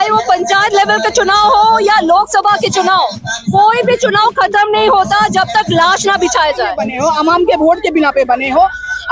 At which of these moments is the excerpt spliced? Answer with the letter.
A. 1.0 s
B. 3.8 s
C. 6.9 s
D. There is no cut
C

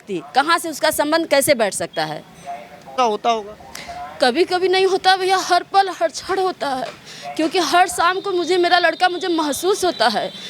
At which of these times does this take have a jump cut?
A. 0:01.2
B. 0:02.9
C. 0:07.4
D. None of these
B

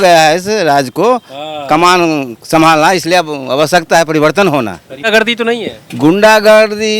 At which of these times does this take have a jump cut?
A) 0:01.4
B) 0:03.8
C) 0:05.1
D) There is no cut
C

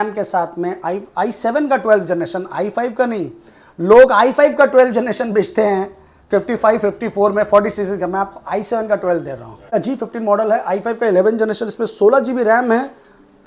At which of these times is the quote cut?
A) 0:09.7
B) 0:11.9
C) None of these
A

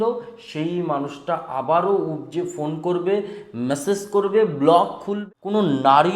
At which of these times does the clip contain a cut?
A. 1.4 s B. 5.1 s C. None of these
B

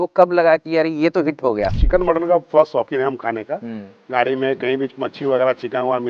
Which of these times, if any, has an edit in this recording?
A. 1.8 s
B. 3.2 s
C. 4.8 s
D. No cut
A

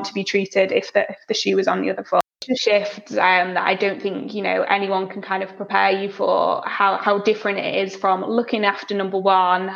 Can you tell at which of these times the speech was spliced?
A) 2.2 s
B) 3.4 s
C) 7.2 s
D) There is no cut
A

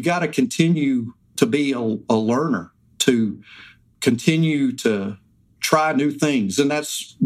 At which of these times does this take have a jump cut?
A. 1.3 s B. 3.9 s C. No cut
A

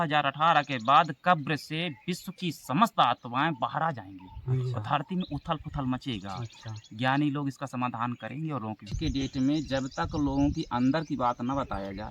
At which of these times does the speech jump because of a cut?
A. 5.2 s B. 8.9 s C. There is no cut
B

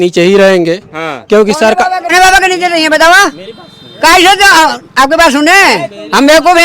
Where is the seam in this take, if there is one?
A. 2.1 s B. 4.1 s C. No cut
A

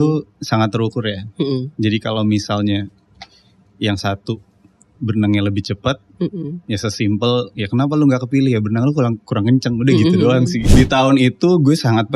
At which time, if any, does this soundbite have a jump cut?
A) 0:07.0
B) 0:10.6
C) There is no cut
B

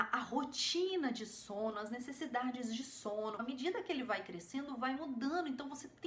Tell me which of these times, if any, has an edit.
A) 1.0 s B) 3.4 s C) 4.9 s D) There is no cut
B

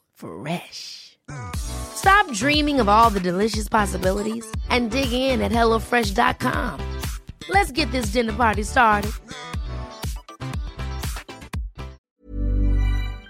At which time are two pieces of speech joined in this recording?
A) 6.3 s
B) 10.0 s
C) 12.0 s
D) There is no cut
C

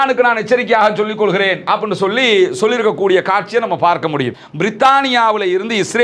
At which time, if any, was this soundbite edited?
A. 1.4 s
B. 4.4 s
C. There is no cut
B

